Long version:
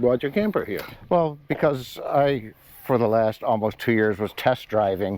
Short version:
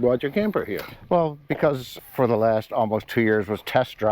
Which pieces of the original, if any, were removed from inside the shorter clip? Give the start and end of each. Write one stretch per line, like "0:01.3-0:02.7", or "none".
0:01.9-0:02.6